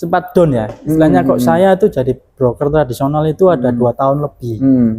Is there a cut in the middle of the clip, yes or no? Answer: no